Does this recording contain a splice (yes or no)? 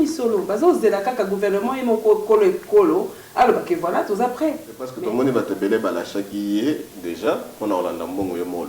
yes